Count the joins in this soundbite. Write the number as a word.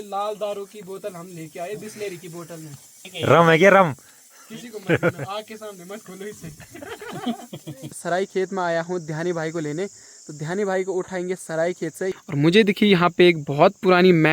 three